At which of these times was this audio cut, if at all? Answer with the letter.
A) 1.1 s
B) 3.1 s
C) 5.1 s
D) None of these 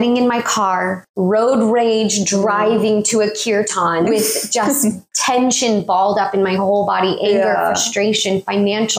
C